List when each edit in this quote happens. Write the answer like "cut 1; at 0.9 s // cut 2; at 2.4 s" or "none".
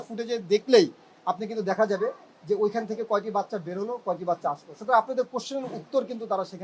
none